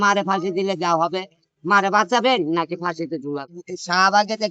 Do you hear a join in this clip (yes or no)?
yes